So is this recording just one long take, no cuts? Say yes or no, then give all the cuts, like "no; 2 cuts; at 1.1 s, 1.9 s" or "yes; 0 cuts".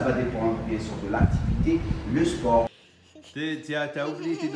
no; 1 cut; at 2.7 s